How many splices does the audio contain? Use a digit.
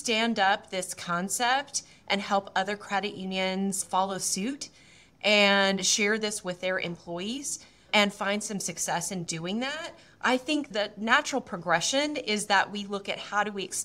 1